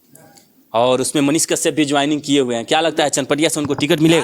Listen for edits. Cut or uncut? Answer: uncut